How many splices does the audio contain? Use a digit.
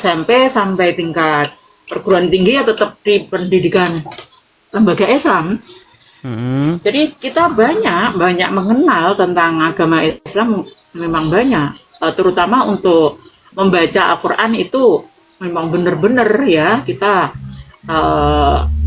0